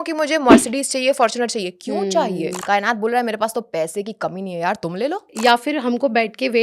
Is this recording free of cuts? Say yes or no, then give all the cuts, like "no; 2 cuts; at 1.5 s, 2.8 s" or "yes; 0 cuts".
no; 2 cuts; at 2.6 s, 5.3 s